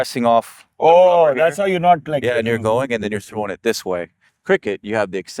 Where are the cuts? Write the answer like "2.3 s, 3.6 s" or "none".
4.3 s